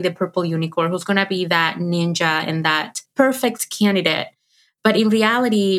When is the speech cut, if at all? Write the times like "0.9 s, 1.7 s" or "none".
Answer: 3.0 s